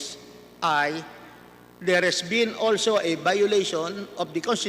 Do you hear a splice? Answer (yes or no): no